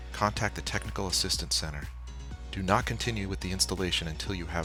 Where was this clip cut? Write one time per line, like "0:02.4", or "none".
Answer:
none